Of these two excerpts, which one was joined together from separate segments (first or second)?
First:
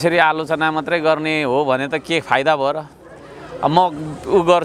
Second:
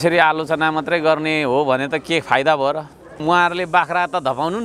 second